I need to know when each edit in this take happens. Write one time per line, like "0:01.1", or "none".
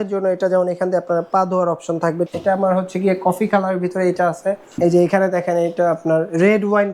0:02.3
0:04.8